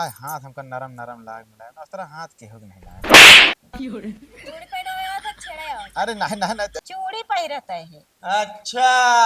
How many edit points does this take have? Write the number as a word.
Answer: one